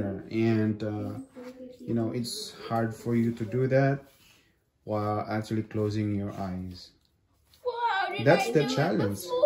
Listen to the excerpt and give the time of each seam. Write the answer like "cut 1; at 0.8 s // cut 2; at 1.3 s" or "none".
none